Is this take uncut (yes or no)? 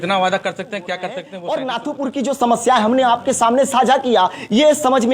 no